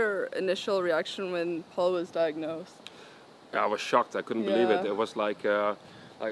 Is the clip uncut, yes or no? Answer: yes